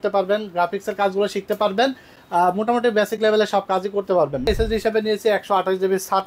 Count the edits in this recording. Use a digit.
1